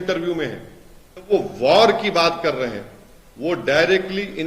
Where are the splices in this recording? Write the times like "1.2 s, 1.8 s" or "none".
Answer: 1.3 s